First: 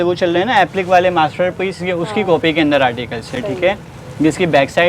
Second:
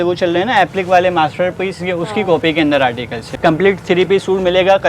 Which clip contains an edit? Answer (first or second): second